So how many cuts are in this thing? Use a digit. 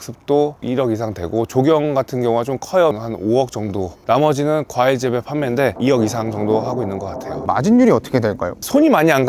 3